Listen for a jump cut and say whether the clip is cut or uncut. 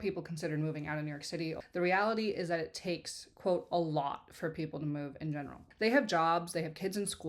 cut